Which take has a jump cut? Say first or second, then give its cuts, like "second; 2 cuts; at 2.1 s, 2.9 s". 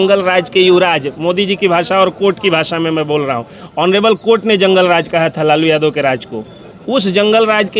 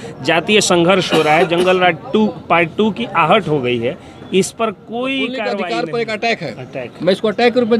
second; 1 cut; at 5.5 s